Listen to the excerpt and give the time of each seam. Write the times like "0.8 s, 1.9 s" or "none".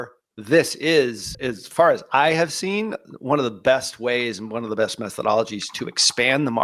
1.3 s